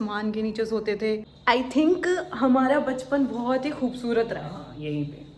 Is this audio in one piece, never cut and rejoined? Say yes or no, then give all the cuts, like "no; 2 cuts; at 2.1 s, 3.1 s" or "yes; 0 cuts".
no; 1 cut; at 1.3 s